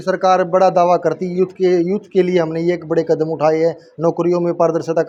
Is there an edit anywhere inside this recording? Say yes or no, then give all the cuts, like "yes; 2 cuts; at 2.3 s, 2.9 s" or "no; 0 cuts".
no; 0 cuts